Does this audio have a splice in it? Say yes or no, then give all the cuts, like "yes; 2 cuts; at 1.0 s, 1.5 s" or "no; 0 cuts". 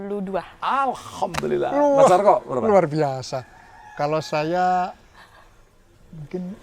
no; 0 cuts